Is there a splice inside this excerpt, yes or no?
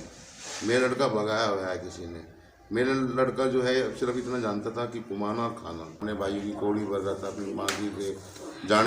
yes